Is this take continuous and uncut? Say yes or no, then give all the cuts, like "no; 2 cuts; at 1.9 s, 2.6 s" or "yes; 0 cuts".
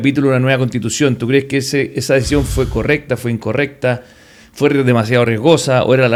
yes; 0 cuts